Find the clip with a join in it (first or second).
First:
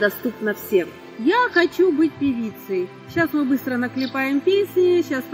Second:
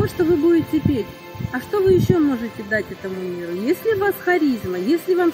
first